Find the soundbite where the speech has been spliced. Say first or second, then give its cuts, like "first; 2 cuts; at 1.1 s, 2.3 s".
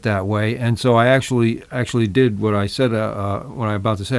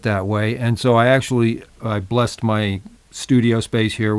second; 1 cut; at 1.7 s